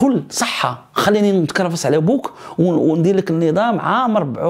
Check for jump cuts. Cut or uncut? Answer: uncut